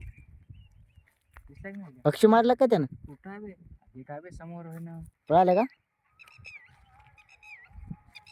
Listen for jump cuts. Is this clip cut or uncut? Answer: cut